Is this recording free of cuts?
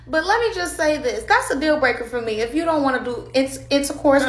yes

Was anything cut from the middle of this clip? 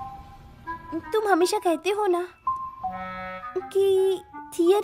no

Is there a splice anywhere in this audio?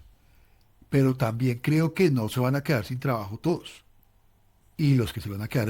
yes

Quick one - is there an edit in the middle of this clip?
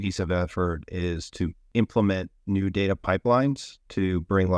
yes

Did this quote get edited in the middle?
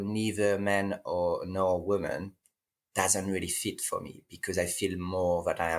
no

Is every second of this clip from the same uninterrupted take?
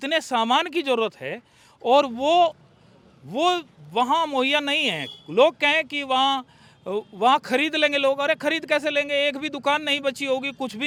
yes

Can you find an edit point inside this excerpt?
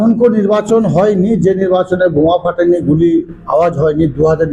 no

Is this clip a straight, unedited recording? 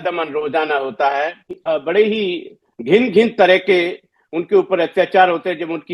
no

